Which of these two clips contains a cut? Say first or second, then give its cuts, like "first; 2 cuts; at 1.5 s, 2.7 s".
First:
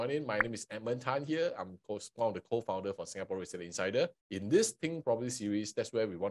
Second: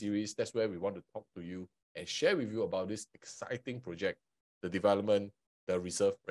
first; 1 cut; at 4.3 s